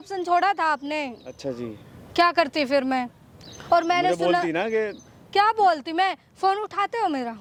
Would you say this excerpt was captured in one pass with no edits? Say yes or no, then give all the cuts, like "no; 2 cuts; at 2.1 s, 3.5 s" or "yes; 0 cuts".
yes; 0 cuts